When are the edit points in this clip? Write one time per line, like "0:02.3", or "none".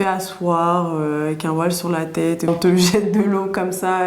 0:02.5